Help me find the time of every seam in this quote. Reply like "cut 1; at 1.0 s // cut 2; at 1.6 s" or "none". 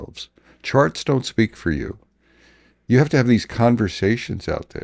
none